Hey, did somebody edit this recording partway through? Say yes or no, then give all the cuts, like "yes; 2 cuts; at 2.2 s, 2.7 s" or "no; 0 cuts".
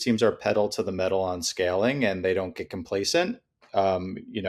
no; 0 cuts